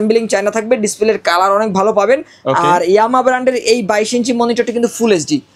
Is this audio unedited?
yes; 0 cuts

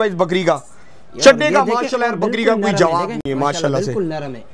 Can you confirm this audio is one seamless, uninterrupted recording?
yes; 0 cuts

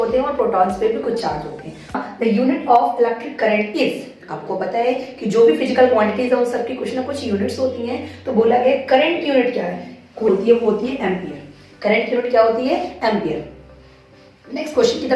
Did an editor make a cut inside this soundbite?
yes; 2 cuts; at 2.0 s, 10.3 s

